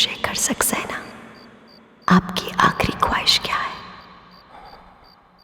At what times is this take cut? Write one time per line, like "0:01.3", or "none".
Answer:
none